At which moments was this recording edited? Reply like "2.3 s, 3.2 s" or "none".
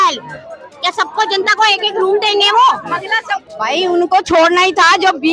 3.4 s